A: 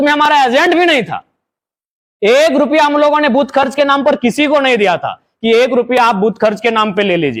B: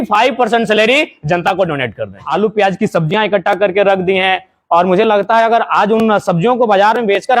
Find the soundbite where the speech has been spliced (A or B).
B